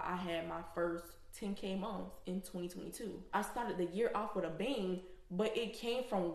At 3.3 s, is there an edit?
yes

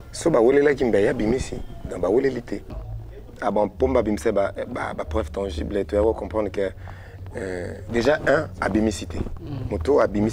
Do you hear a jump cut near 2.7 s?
yes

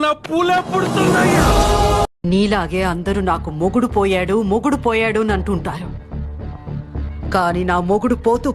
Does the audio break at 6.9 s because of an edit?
no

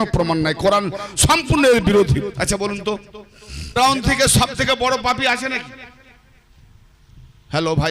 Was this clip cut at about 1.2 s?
no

